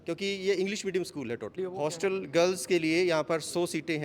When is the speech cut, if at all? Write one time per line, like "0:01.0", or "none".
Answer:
0:01.6

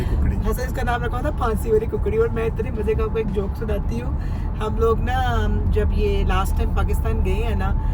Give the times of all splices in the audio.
none

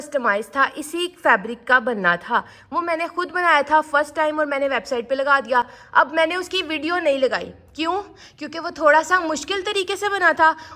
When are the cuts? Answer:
none

